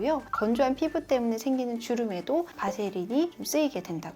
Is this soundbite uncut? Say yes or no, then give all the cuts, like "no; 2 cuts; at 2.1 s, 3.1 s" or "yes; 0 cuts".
yes; 0 cuts